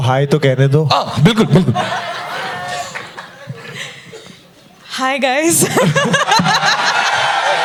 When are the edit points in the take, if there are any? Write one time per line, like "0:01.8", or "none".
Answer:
none